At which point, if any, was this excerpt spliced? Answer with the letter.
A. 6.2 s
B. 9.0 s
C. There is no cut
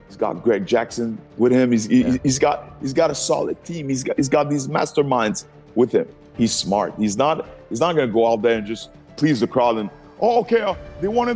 A